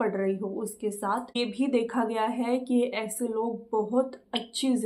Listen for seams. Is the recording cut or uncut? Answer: cut